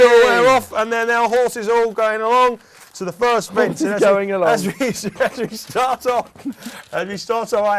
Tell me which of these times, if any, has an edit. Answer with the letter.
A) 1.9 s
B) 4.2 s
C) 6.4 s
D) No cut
A